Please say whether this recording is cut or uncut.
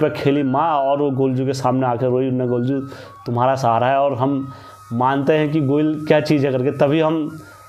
uncut